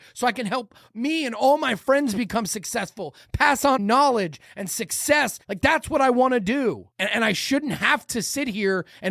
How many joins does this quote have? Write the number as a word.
three